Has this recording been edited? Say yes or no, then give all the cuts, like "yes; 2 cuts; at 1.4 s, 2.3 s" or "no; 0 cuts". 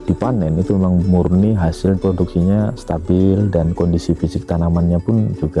yes; 1 cut; at 2.0 s